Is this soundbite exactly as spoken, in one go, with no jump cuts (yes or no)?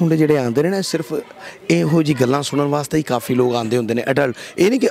yes